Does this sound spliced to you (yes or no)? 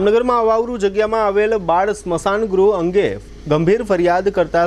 no